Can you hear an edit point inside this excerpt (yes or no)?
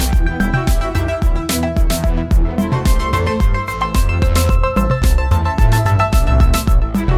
no